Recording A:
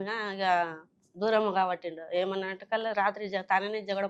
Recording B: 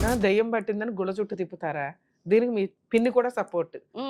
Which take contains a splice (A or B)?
B